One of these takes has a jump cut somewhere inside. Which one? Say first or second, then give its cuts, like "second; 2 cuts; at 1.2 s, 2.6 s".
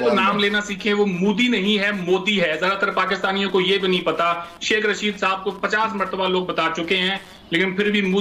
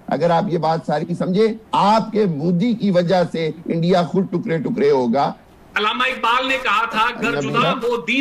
second; 2 cuts; at 1.6 s, 5.4 s